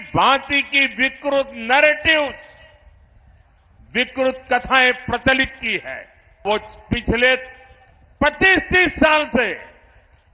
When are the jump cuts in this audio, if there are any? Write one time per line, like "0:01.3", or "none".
0:06.4